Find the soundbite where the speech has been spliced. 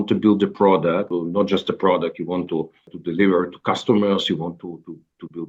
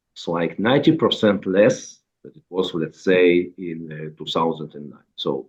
first; 2 cuts; at 1.1 s, 2.9 s

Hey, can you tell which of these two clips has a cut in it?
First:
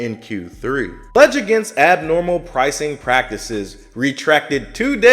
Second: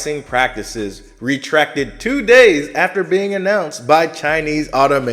first; 1 cut; at 1.2 s

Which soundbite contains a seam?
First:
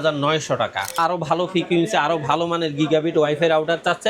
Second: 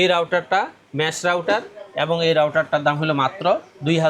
first; 1 cut; at 1.0 s

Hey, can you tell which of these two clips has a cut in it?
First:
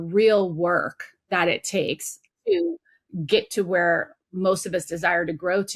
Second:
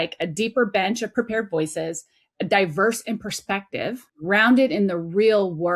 second; 2 cuts; at 1.1 s, 4.1 s

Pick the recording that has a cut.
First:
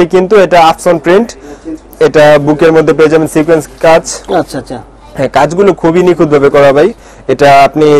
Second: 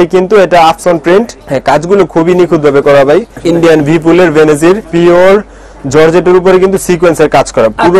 second; 3 cuts; at 1.4 s, 3.3 s, 4.9 s

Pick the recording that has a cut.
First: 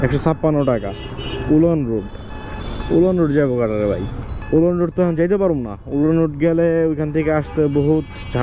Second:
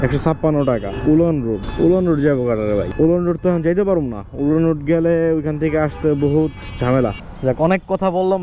second; 4 cuts; at 0.9 s, 1.7 s, 2.9 s, 7.3 s

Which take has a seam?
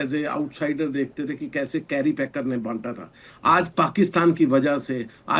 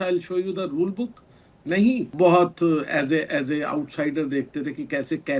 second; 1 cut; at 2.1 s

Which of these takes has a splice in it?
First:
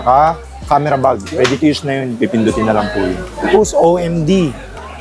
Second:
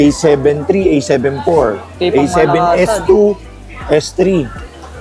first; 1 cut; at 3.5 s

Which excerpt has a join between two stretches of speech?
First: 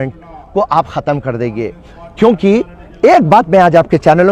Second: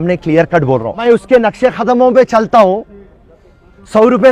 second; 1 cut; at 1.0 s

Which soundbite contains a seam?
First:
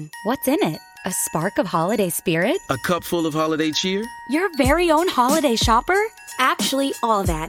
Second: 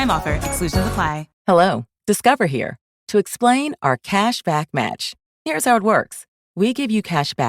second; 1 cut; at 1.2 s

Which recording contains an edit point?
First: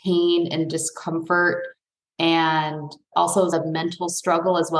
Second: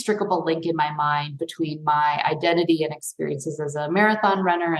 first; 1 cut; at 3.0 s

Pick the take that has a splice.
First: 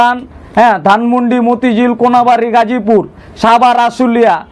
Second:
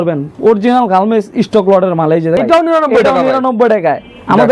second; 1 cut; at 2.4 s

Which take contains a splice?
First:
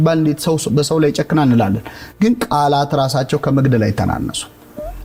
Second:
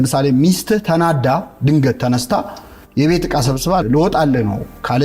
second; 1 cut; at 3.8 s

